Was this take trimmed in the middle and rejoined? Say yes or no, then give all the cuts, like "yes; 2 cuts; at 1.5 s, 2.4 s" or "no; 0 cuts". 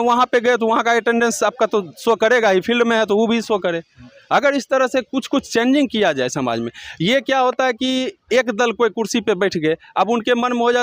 no; 0 cuts